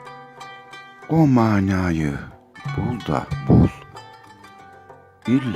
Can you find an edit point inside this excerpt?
yes; 1 cut; at 1.1 s

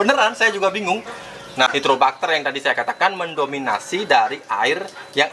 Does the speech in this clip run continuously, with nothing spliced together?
no; 1 cut; at 1.7 s

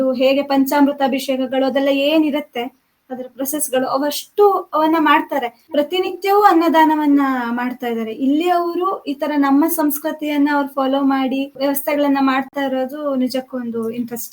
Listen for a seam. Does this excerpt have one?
yes; 2 cuts; at 5.6 s, 11.5 s

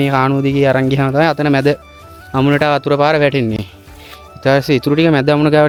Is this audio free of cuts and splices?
yes; 0 cuts

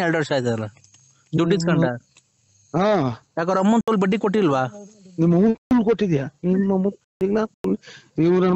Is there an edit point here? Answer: no; 0 cuts

